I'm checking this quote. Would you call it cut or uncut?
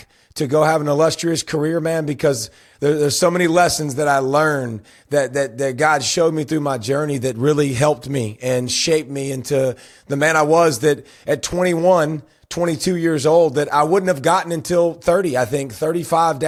uncut